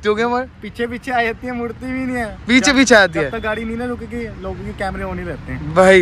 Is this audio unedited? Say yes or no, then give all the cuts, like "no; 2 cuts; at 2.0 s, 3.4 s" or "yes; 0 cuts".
yes; 0 cuts